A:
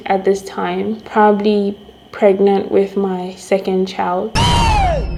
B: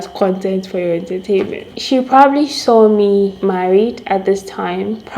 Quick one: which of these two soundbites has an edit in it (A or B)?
B